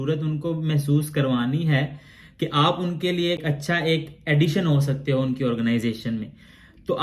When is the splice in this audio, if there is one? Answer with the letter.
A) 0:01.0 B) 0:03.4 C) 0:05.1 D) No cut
B